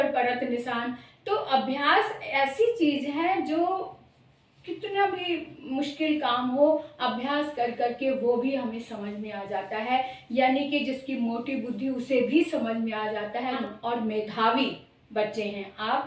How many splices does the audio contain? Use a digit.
1